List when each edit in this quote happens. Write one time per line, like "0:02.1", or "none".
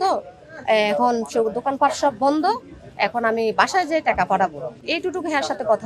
0:04.8